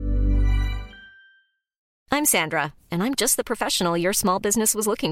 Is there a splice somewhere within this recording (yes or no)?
yes